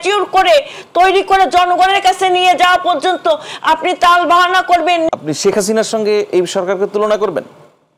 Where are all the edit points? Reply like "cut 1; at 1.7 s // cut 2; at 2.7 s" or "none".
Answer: cut 1; at 5.1 s

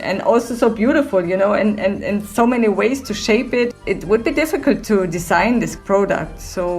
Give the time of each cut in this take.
cut 1; at 3.7 s // cut 2; at 5.8 s

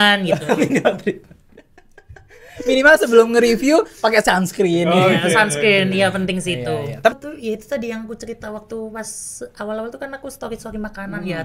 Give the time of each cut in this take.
cut 1; at 7.1 s

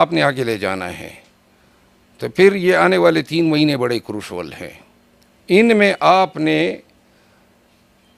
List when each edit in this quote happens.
none

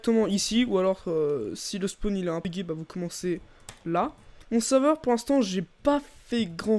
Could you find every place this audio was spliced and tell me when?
cut 1; at 2.5 s // cut 2; at 4.1 s

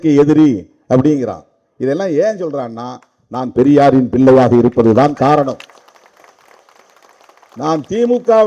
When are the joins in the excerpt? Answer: none

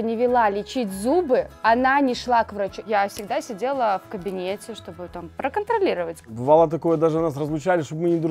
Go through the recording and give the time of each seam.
cut 1; at 2.8 s // cut 2; at 6.3 s

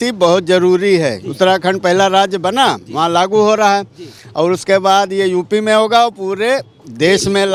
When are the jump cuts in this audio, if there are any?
none

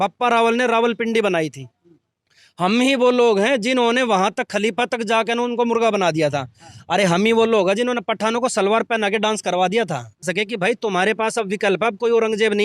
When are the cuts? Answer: cut 1; at 10.3 s

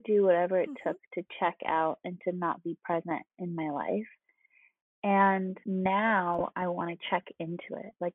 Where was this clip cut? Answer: cut 1; at 5.6 s

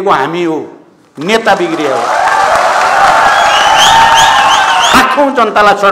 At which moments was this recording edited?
cut 1; at 4.9 s

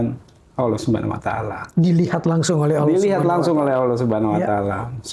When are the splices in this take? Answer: none

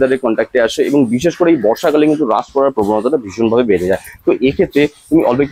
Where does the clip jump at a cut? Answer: none

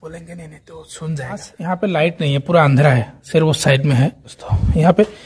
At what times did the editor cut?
cut 1; at 1.5 s

